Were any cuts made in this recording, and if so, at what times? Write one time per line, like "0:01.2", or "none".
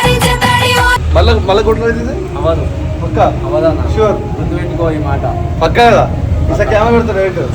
0:01.0